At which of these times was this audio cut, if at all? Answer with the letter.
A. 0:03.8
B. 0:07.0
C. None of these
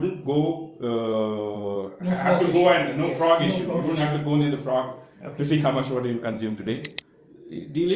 B